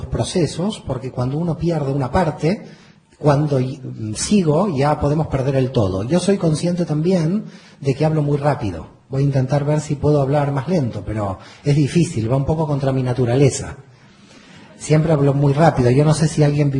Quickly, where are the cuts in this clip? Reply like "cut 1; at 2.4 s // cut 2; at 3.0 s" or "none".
none